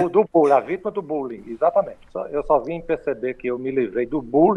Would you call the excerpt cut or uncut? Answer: cut